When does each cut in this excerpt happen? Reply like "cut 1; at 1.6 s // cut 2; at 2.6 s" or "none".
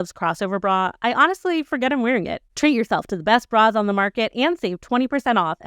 cut 1; at 2.5 s